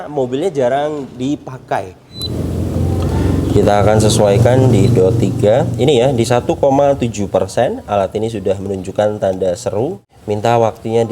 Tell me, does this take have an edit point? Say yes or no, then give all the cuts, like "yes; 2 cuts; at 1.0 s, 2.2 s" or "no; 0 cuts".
yes; 2 cuts; at 2.5 s, 10.0 s